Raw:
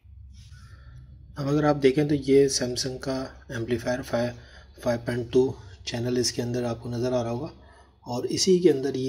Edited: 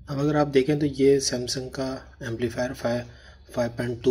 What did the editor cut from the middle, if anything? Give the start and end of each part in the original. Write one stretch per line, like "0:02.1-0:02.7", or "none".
none